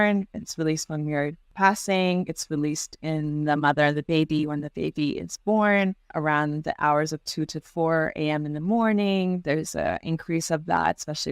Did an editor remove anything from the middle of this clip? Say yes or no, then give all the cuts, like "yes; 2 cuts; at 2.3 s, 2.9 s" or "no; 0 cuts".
yes; 2 cuts; at 1.4 s, 6.1 s